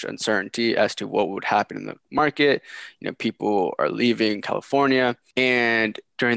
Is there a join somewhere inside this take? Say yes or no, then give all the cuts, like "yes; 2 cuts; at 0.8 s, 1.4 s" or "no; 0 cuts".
no; 0 cuts